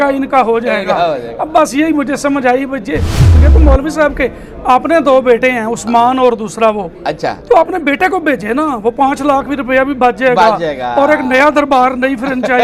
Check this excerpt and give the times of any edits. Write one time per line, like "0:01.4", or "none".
0:03.4